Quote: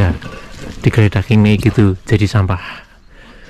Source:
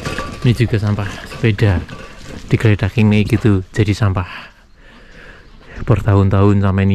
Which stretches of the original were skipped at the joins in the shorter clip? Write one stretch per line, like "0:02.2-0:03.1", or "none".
none